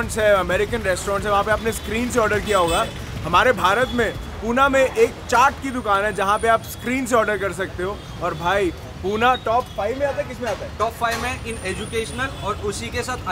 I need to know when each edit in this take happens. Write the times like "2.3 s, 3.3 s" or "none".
none